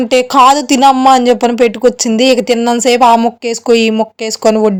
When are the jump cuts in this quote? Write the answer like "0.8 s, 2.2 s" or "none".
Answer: none